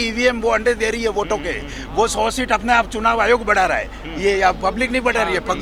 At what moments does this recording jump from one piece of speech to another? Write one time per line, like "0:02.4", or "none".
none